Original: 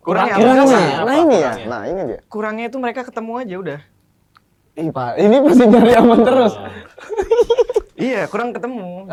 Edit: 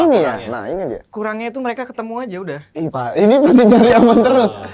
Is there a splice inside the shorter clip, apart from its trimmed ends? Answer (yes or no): yes